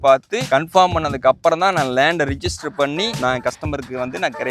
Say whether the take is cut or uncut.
uncut